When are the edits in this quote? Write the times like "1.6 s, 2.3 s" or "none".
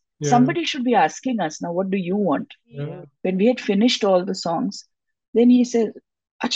3.0 s